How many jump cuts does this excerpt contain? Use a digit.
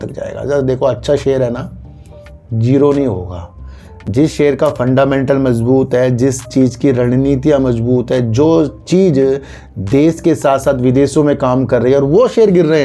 0